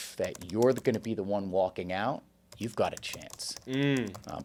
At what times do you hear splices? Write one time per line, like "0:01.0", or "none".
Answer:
none